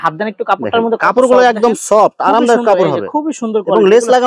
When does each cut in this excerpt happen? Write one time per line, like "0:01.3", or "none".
none